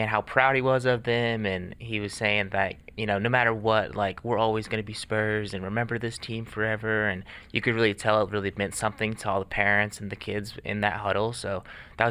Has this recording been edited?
no; 0 cuts

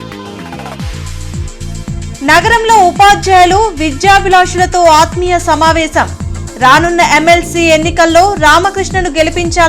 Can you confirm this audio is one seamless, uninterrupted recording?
no; 2 cuts; at 1.4 s, 1.8 s

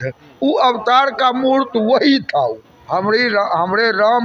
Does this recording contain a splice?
yes; 1 cut; at 2.7 s

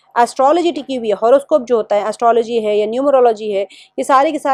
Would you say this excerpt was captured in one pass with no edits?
yes; 0 cuts

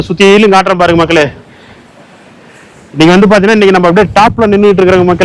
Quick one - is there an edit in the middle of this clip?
no; 0 cuts

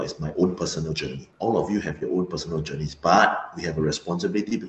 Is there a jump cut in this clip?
yes; 1 cut; at 1.2 s

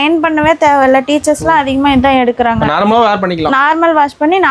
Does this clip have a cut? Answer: no; 0 cuts

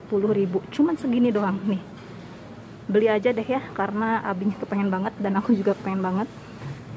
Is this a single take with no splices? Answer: yes; 0 cuts

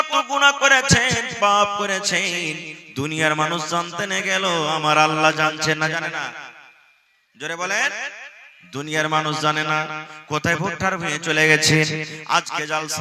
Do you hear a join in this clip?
no; 0 cuts

